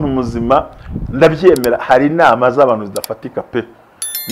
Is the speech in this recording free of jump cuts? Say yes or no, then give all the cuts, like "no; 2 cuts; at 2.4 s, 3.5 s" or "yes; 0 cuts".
yes; 0 cuts